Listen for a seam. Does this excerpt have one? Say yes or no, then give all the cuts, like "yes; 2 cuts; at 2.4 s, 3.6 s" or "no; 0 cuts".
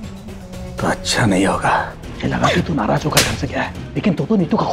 yes; 1 cut; at 2.0 s